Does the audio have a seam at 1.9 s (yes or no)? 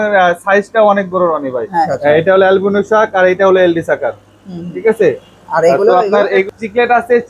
yes